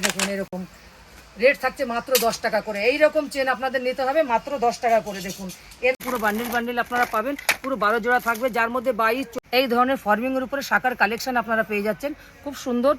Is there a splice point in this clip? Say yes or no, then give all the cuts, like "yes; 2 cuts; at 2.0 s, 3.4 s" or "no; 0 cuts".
yes; 2 cuts; at 6.0 s, 9.3 s